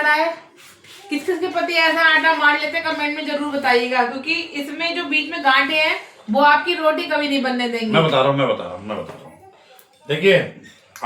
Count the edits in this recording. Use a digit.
0